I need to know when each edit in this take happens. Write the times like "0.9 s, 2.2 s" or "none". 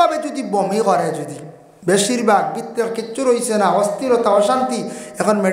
none